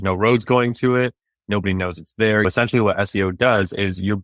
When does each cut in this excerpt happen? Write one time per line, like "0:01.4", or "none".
0:02.4